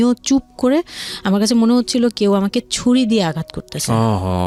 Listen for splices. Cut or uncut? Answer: uncut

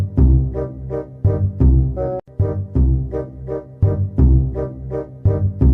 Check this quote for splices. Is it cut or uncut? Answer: cut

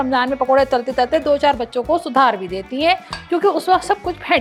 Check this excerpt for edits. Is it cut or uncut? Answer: uncut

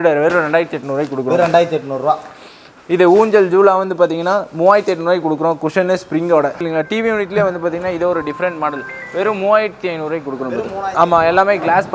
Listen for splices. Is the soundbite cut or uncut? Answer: cut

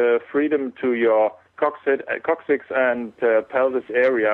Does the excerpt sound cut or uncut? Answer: cut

